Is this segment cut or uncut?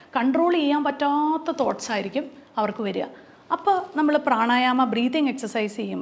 uncut